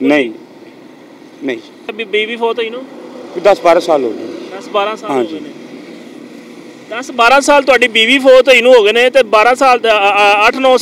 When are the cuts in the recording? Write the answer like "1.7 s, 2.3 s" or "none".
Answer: 1.9 s